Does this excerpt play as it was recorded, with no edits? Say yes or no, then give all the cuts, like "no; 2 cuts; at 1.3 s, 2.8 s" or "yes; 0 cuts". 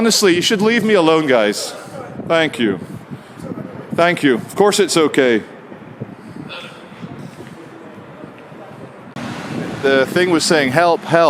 no; 1 cut; at 9.2 s